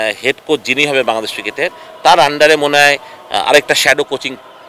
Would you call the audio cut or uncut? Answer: uncut